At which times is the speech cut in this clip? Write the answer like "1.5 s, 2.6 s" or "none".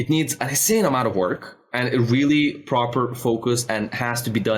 none